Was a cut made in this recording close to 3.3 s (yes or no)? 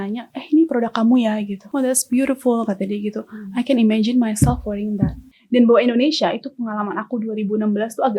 no